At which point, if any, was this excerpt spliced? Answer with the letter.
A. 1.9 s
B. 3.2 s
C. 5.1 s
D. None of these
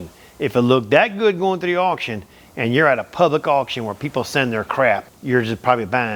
C